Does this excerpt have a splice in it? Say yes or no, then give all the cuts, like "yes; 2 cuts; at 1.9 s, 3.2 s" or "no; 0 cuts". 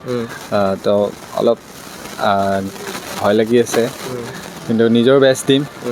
no; 0 cuts